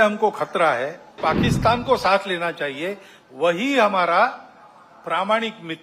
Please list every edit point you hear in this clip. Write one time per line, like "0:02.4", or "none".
0:01.2